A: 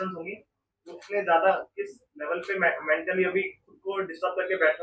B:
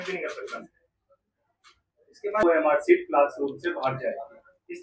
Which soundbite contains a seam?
B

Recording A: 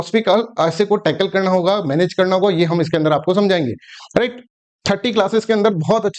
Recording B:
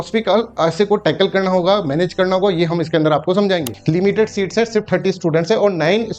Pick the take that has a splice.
B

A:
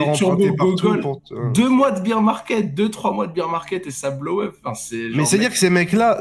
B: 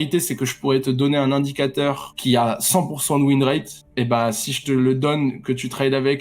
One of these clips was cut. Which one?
B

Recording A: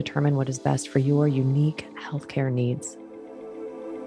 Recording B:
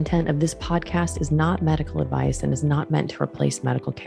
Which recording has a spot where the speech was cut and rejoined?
A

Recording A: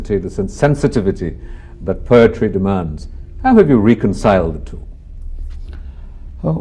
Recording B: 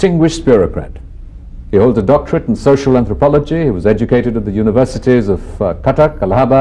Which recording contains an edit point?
B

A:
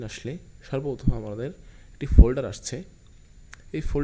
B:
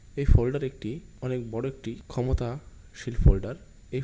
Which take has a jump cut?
B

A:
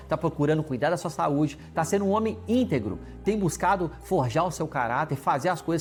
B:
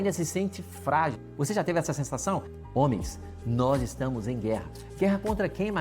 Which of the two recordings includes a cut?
B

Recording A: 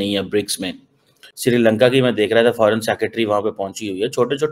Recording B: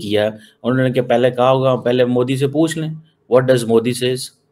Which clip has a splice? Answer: A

